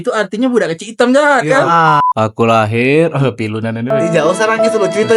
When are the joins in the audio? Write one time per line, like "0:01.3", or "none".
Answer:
0:02.0